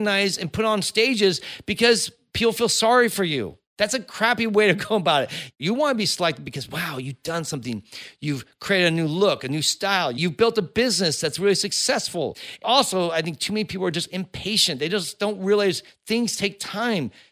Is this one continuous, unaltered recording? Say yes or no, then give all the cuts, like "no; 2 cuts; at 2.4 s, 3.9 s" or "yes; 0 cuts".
no; 3 cuts; at 5.5 s, 10.2 s, 12.6 s